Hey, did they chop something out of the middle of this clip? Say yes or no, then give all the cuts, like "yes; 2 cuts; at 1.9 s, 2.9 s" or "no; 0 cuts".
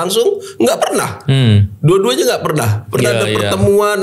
no; 0 cuts